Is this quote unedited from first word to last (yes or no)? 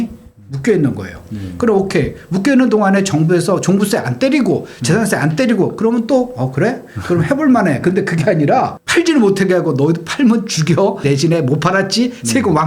no